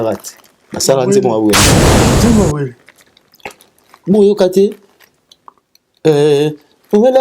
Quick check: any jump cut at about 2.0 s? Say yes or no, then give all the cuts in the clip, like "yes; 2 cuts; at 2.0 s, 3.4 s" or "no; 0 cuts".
yes; 1 cut; at 2.0 s